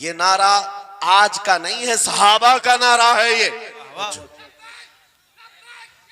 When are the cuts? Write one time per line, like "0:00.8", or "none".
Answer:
0:04.1